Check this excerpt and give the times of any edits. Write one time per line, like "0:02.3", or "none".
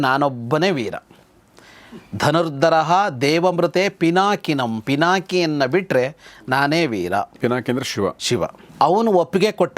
0:08.6